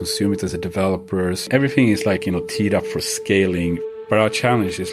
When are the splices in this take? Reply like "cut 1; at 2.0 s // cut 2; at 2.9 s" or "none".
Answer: cut 1; at 1.5 s // cut 2; at 3.8 s